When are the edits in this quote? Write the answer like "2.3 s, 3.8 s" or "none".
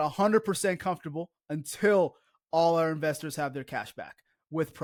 none